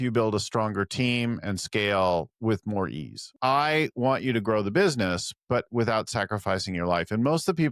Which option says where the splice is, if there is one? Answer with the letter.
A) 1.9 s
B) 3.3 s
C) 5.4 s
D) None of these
B